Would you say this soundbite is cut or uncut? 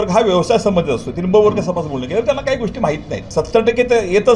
cut